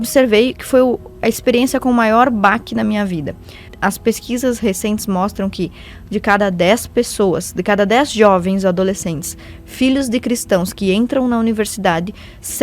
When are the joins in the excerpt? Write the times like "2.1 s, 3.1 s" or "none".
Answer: 3.7 s